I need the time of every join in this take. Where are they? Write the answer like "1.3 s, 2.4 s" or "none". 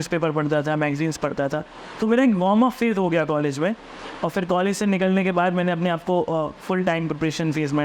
none